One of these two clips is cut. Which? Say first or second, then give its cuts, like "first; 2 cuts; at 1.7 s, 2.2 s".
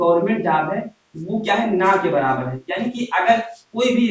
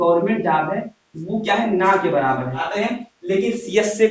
second; 1 cut; at 2.7 s